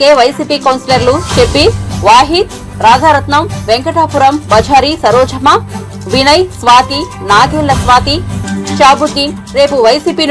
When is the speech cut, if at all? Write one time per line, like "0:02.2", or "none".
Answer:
none

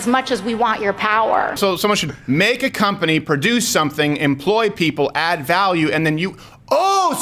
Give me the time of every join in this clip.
0:01.6

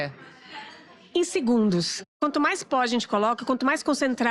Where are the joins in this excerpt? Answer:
0:02.2

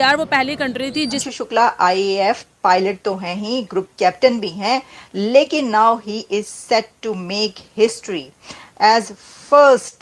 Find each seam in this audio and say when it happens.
0:01.2

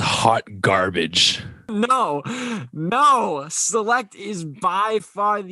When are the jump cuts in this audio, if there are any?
0:01.7

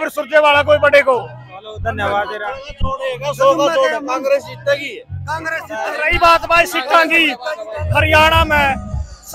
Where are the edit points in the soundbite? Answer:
none

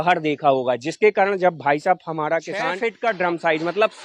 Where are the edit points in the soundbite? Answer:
0:02.8

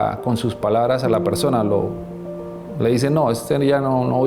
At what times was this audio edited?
none

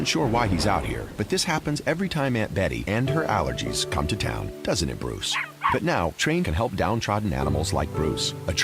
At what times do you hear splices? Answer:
0:01.6

